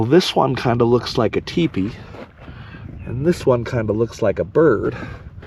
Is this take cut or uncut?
uncut